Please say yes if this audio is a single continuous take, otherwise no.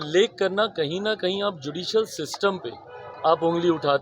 yes